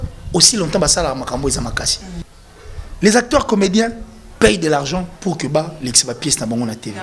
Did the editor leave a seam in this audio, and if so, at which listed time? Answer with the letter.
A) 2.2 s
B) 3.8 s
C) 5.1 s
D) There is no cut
A